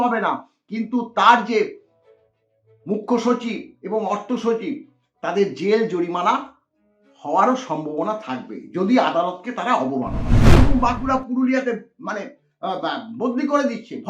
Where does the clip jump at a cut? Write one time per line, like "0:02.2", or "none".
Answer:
0:10.6